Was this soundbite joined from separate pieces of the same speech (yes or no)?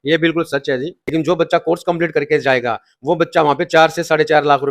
yes